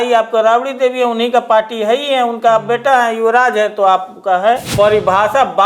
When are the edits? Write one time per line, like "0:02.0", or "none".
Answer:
0:04.7